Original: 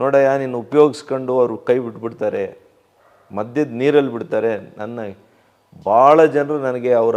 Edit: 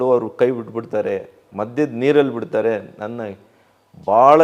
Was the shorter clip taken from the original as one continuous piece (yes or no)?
no